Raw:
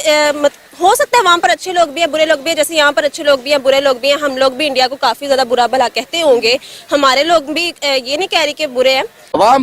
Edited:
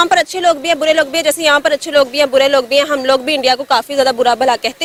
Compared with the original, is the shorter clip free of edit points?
yes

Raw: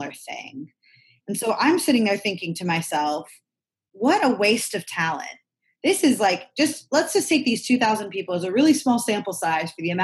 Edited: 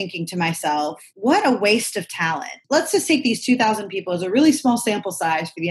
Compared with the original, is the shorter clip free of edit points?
no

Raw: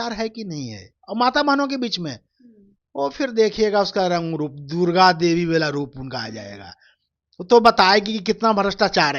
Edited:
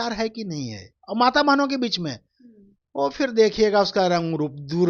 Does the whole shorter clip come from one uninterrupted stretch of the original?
yes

